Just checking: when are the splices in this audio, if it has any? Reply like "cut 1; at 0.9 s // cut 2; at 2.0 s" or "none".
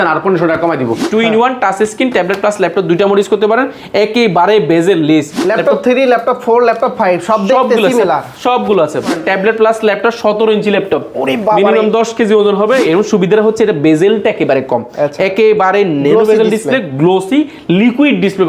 cut 1; at 1.0 s // cut 2; at 5.4 s // cut 3; at 9.1 s // cut 4; at 12.8 s

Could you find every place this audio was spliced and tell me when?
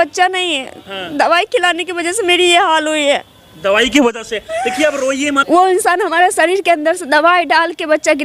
cut 1; at 5.4 s

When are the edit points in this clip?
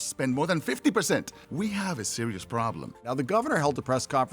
cut 1; at 1.4 s // cut 2; at 3.1 s

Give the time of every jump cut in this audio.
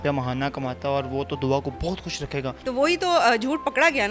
cut 1; at 2.6 s

